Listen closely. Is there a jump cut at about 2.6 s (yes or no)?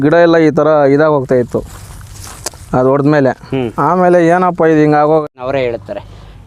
no